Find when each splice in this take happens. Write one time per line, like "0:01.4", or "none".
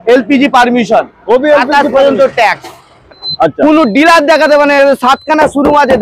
0:03.2